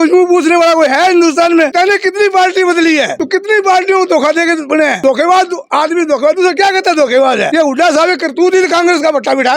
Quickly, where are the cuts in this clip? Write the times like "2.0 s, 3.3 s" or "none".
1.7 s, 3.2 s, 5.0 s, 7.5 s